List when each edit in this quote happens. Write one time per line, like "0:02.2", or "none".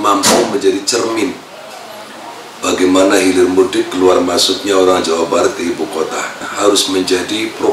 0:06.5